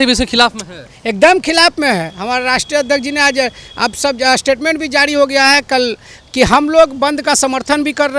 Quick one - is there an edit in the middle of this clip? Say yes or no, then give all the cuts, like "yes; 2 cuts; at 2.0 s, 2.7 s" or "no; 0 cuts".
no; 0 cuts